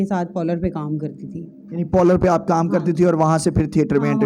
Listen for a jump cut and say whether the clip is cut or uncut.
uncut